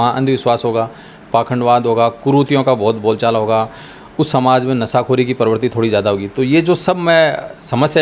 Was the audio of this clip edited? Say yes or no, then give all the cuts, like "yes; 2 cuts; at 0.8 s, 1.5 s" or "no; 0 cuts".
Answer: no; 0 cuts